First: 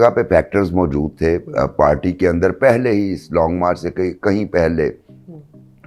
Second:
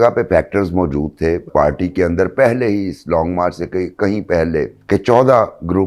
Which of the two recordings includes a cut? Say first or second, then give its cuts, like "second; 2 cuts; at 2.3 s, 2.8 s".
second; 2 cuts; at 1.5 s, 4.8 s